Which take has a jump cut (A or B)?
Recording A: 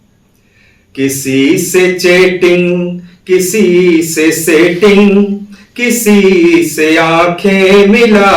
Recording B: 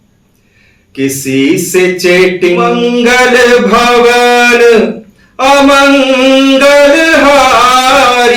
B